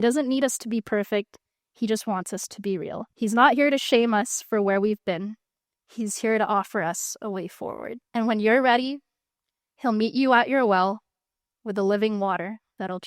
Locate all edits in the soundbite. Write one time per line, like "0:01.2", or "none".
0:03.1
0:08.0